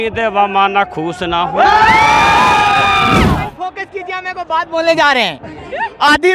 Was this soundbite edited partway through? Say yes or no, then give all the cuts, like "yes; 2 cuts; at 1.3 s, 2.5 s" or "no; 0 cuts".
yes; 1 cut; at 3.4 s